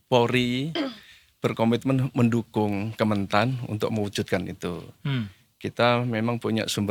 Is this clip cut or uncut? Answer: uncut